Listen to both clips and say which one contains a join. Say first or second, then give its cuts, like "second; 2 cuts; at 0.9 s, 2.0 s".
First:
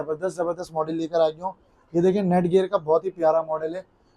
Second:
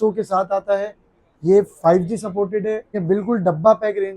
second; 1 cut; at 3.0 s